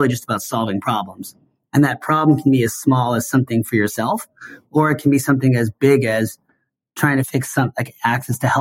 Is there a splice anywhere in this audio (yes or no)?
yes